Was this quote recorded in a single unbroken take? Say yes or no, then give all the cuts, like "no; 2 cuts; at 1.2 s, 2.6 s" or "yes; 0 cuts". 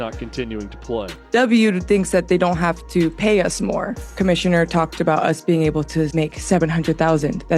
no; 2 cuts; at 1.2 s, 4.1 s